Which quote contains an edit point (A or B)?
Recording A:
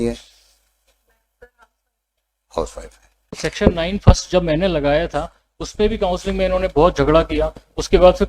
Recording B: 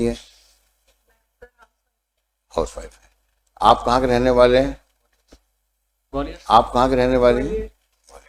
A